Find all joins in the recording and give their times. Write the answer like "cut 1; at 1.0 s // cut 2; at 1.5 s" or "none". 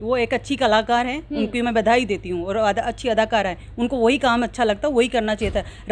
none